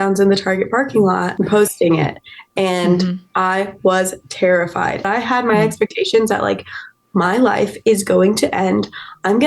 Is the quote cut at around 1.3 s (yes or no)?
yes